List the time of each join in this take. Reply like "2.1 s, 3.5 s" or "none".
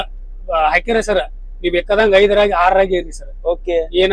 none